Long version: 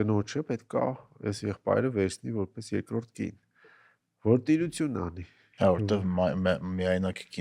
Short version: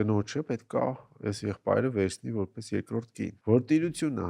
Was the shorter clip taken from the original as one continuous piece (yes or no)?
no